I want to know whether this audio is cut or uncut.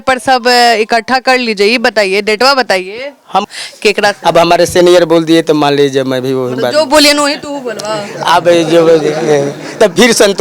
cut